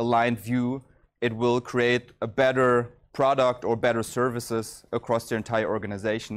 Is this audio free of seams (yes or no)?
no